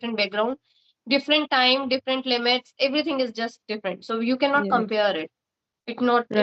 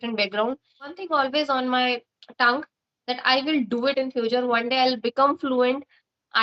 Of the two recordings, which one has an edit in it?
second; 1 cut; at 1.0 s

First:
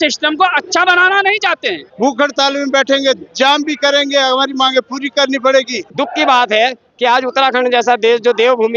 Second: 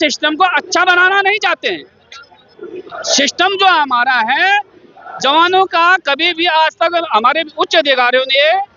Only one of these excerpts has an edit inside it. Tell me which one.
first; 2 cuts; at 1.8 s, 5.9 s

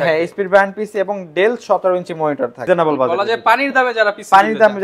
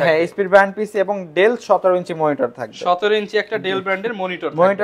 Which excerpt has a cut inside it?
first; 1 cut; at 2.6 s

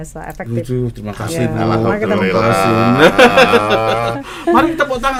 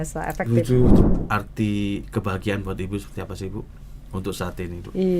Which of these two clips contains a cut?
second; 1 cut; at 1.0 s

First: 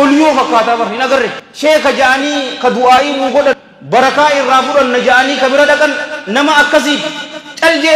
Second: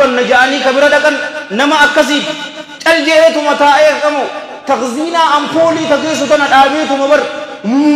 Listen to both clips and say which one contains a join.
first; 2 cuts; at 1.4 s, 3.7 s

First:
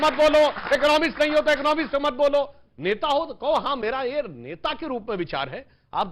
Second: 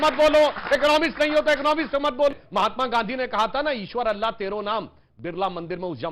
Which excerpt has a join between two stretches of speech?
second; 1 cut; at 2.3 s

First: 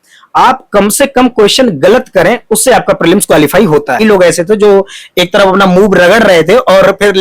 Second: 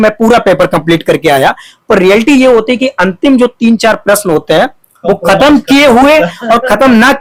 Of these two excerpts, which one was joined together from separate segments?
first; 1 cut; at 4.0 s

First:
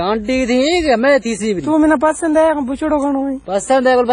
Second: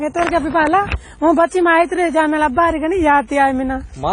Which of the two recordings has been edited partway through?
second; 1 cut; at 1.0 s

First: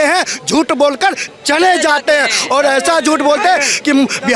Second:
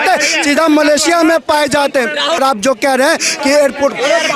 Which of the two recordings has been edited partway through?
second; 1 cut; at 2.4 s

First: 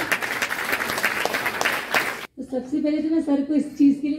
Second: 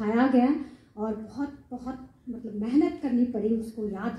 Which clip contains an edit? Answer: first; 1 cut; at 2.1 s

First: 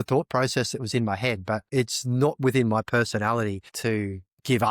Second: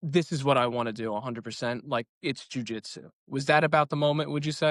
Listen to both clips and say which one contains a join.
first; 2 cuts; at 1.7 s, 3.7 s

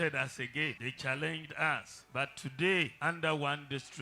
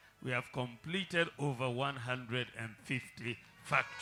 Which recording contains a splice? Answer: first; 3 cuts; at 0.9 s, 2.0 s, 2.9 s

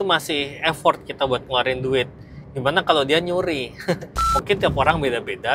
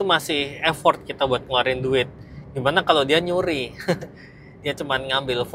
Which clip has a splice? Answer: first; 1 cut; at 4.1 s

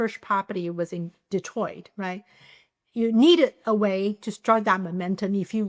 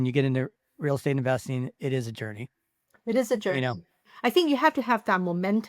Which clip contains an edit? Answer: second; 1 cut; at 4.1 s

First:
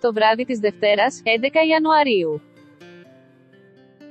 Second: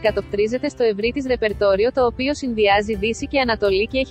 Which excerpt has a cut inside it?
first; 1 cut; at 2.4 s

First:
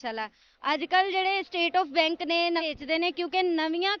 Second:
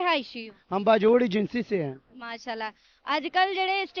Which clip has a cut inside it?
first; 1 cut; at 2.6 s

